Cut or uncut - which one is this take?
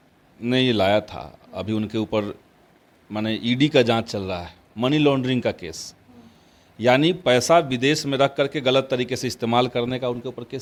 uncut